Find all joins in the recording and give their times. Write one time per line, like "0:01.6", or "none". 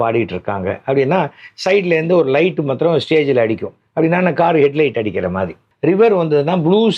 0:05.7